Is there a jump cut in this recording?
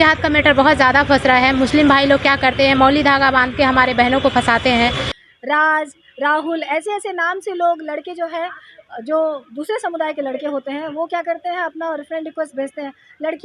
yes; 1 cut; at 5.1 s

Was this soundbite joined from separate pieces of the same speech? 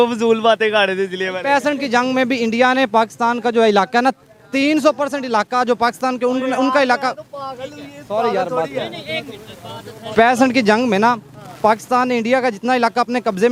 no; 0 cuts

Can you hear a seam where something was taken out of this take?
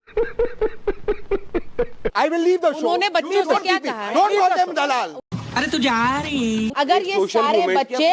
yes; 2 cuts; at 2.0 s, 6.7 s

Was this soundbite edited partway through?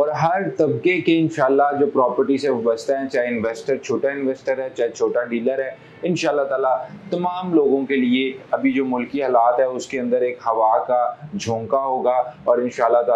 no; 0 cuts

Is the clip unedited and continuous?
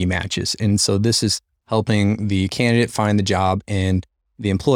yes; 0 cuts

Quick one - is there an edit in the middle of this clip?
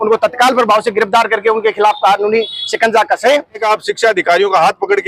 yes; 1 cut; at 3.6 s

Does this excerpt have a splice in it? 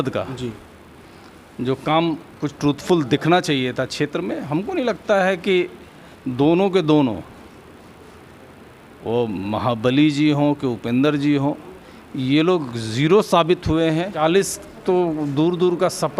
yes; 1 cut; at 14.1 s

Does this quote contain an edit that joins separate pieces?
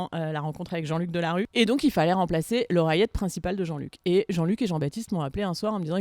yes; 1 cut; at 1.5 s

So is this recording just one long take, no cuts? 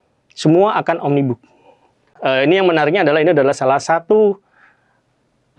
no; 1 cut; at 2.2 s

